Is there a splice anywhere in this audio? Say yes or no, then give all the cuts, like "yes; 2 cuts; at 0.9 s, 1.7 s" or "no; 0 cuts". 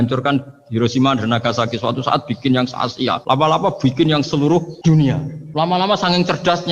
yes; 2 cuts; at 3.2 s, 5.0 s